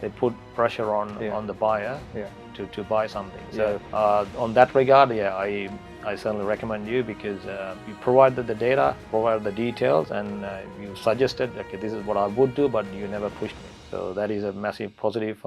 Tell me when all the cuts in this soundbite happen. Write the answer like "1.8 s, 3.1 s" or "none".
none